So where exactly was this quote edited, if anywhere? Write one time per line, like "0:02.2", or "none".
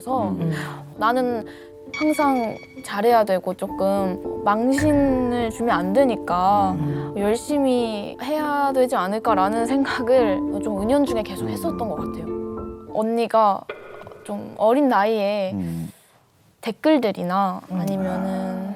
0:04.3
0:12.7

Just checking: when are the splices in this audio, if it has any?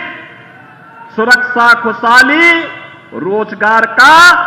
none

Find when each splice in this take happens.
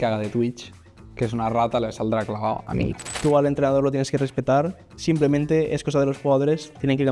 0:03.1
0:04.8

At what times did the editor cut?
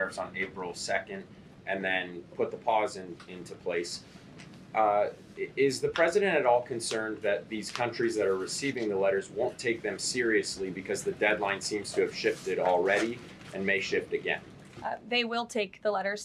none

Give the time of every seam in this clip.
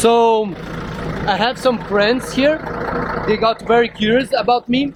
none

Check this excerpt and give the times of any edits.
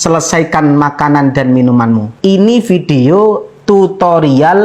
0:02.1

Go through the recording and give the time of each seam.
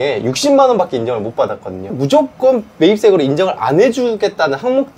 0:01.9

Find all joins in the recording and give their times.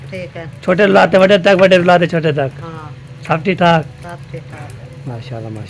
none

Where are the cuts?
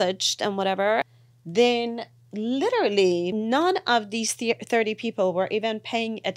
0:01.1
0:03.3

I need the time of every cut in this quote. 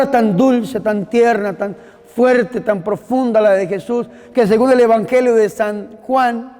none

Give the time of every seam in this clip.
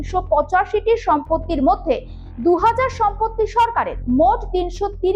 0:04.0

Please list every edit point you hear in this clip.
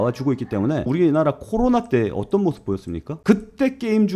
0:00.9
0:03.1

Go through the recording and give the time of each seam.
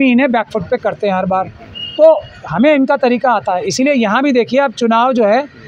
none

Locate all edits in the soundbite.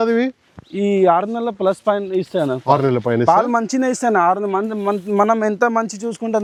none

